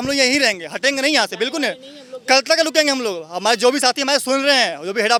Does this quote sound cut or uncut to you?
uncut